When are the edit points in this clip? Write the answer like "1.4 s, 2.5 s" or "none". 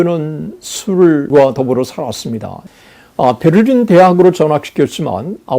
2.6 s